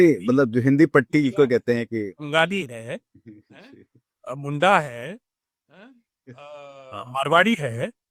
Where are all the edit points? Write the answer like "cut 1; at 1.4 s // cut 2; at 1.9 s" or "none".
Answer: none